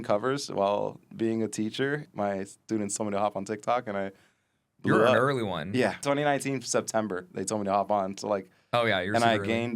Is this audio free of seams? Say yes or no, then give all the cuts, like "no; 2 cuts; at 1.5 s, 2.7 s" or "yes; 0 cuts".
no; 2 cuts; at 2.0 s, 6.0 s